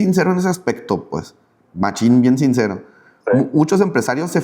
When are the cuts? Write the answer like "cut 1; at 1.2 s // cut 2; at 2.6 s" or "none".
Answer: none